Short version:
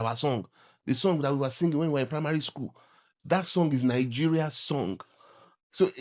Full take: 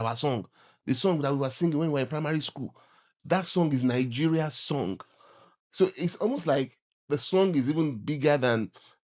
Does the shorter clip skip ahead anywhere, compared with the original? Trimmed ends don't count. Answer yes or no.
no